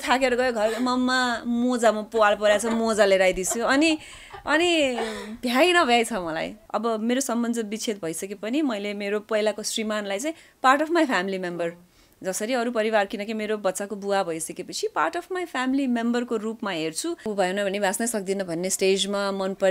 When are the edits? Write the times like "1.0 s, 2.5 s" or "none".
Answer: 6.6 s, 17.3 s